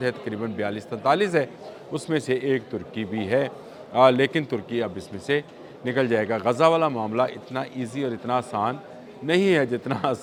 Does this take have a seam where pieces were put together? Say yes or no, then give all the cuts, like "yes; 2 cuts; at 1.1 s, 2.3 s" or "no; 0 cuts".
no; 0 cuts